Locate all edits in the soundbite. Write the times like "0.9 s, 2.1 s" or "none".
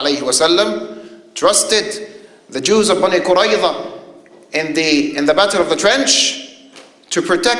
6.4 s